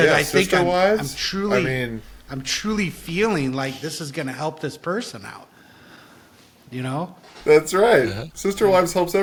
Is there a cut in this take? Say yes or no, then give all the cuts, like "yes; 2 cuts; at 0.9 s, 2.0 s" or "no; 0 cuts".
no; 0 cuts